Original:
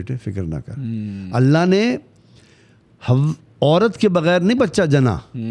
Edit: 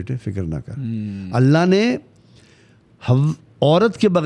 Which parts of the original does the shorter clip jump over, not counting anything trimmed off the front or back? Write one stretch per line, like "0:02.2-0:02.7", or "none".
none

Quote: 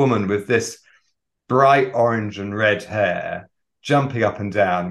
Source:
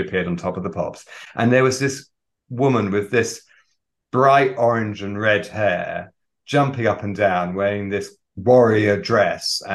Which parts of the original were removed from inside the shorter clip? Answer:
none

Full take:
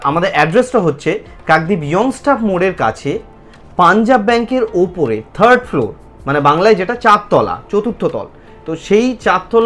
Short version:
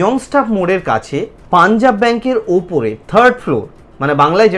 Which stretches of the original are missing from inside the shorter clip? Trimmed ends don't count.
0:03.3-0:03.6

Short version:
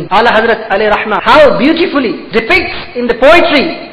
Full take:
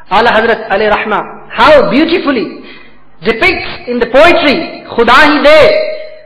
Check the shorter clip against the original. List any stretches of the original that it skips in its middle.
0:01.1-0:01.4
0:02.5-0:03.1

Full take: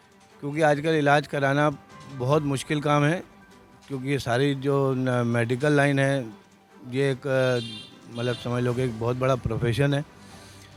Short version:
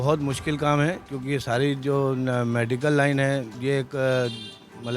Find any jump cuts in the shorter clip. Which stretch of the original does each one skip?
0:03.3-0:03.9
0:06.3-0:06.8

